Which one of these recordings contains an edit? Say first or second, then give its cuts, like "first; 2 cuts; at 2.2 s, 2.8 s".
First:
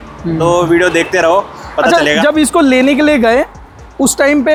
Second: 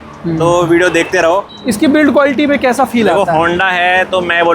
second; 1 cut; at 1.5 s